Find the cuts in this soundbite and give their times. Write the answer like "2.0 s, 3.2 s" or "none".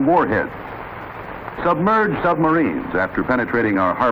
0.9 s